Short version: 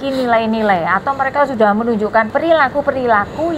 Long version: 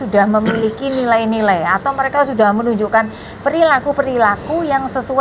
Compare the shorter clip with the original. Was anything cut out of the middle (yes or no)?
yes